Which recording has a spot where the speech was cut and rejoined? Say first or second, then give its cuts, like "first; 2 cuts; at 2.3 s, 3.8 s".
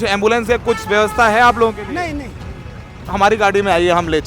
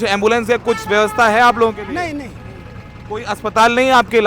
first; 1 cut; at 3.0 s